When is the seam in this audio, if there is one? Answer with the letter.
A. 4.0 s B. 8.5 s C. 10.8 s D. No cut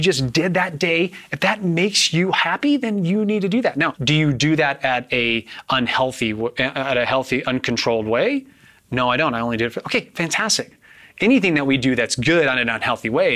A